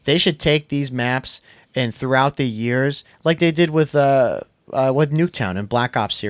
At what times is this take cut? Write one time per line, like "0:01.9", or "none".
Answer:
none